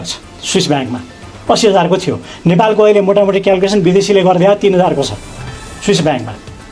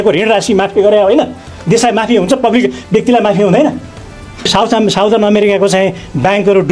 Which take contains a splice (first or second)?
second